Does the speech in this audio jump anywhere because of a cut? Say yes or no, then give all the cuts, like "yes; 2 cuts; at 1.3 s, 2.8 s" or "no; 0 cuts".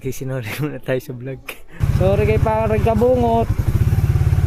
yes; 1 cut; at 1.8 s